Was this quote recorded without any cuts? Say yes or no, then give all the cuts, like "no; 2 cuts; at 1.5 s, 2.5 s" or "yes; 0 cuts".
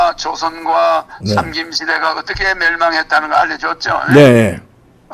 yes; 0 cuts